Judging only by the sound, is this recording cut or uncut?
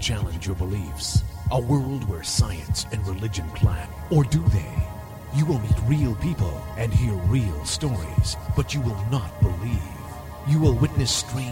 cut